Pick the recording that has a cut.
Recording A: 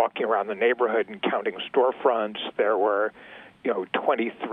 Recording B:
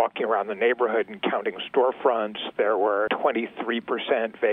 B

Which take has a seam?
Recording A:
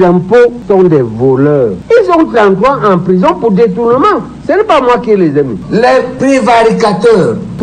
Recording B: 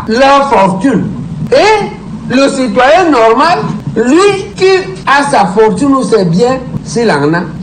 A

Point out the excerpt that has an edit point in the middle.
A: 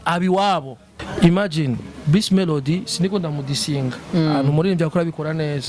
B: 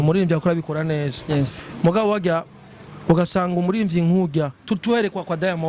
A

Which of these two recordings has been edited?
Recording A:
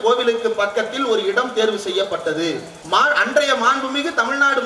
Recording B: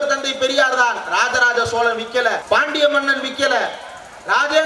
A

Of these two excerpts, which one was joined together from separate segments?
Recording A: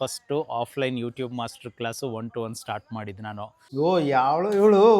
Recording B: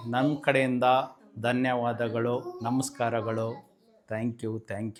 A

